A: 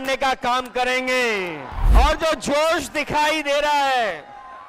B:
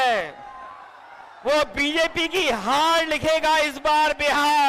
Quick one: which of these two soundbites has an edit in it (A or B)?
A